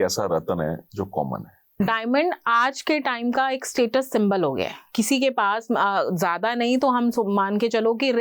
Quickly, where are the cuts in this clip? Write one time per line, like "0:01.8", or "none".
0:01.8
0:04.8